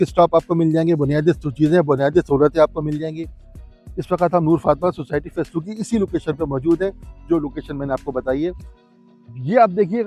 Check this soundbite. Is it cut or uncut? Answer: uncut